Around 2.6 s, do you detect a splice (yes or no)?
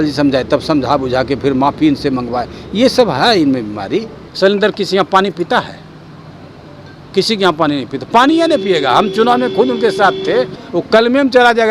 no